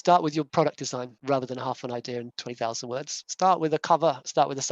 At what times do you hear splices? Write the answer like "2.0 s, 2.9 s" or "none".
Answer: 1.1 s, 3.2 s